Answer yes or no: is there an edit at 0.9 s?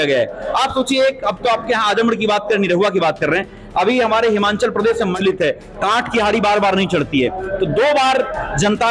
no